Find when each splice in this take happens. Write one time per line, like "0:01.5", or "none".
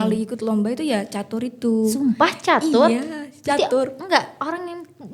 none

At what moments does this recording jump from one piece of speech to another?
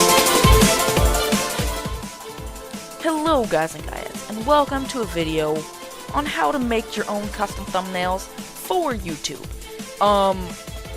none

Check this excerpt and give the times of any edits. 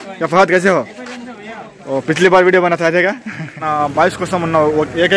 0:03.6

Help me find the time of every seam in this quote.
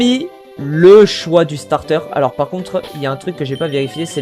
none

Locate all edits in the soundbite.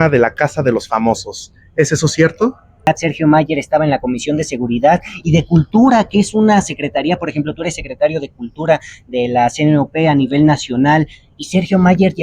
0:02.9

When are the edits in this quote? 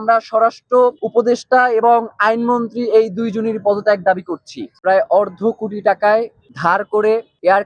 0:01.0
0:04.7

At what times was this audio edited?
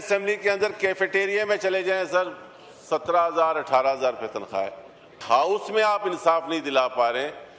0:05.2

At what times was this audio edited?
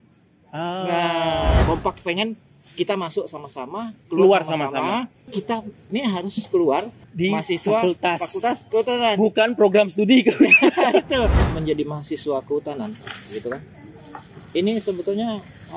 0:01.6
0:05.2
0:07.0
0:11.4

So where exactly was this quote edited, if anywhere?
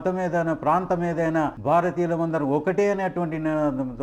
0:01.6

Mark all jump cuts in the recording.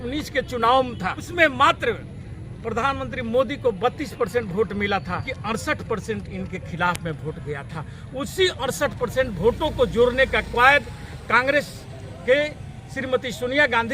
0:01.2
0:05.3

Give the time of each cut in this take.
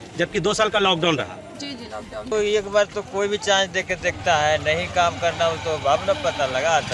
0:02.3

